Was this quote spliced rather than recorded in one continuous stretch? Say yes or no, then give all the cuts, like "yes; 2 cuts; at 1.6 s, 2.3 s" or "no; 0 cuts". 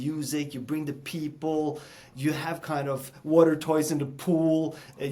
no; 0 cuts